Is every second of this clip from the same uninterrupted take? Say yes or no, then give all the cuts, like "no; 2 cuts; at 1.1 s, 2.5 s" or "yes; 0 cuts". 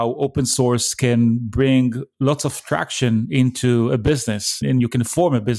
no; 1 cut; at 4.6 s